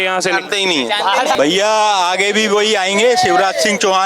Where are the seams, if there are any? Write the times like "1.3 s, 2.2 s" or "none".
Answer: 1.3 s